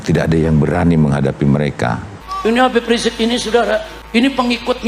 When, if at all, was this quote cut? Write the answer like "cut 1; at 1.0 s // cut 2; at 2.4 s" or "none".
cut 1; at 1.7 s // cut 2; at 4.0 s